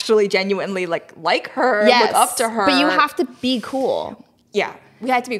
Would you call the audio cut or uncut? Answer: uncut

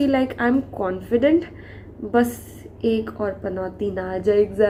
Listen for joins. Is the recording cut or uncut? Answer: uncut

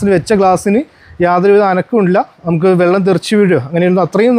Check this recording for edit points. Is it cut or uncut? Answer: uncut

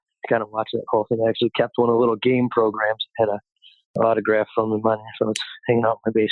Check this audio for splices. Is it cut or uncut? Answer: cut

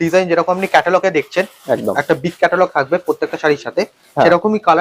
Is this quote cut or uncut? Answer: uncut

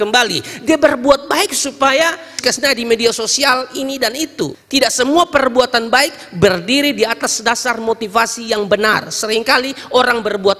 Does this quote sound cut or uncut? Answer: cut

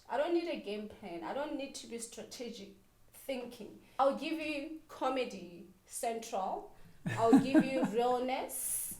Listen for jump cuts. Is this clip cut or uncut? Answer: cut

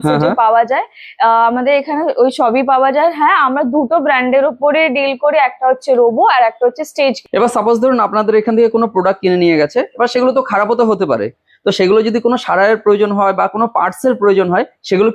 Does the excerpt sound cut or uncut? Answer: uncut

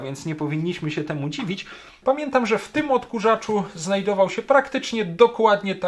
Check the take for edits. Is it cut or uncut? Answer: cut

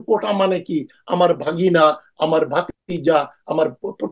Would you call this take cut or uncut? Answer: cut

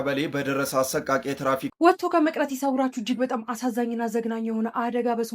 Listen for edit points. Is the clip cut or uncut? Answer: cut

